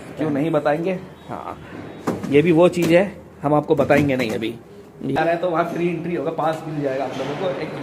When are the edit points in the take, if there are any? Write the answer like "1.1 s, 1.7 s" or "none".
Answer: 5.2 s

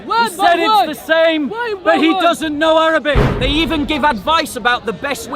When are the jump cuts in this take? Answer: 3.3 s

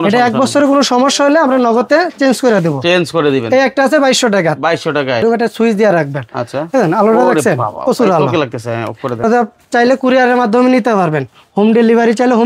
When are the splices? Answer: 5.2 s, 9.2 s

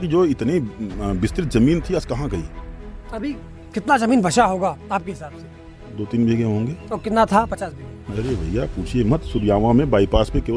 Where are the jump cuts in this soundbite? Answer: none

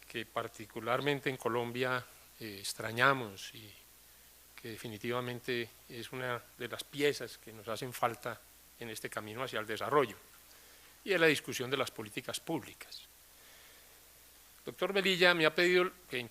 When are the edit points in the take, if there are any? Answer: 1.7 s

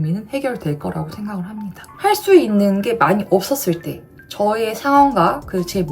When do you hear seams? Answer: 1.9 s

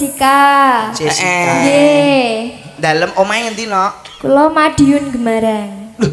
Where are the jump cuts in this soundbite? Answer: none

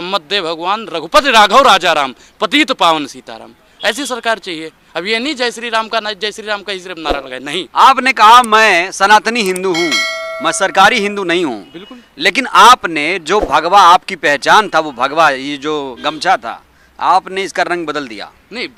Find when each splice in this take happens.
none

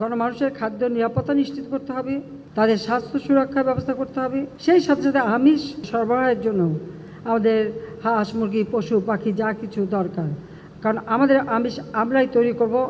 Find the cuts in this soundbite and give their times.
2.4 s, 4.5 s, 5.8 s

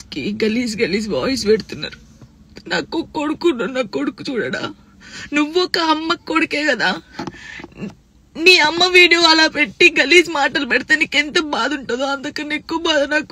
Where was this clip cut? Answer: none

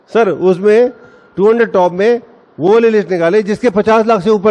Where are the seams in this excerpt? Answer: none

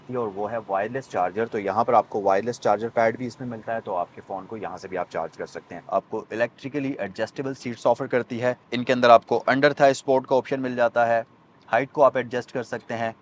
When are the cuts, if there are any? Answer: 5.8 s

